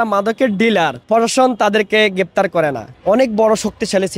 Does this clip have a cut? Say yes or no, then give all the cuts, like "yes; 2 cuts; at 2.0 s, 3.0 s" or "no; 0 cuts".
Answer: yes; 2 cuts; at 1.0 s, 2.9 s